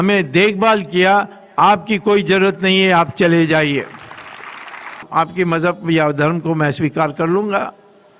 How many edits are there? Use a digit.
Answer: 1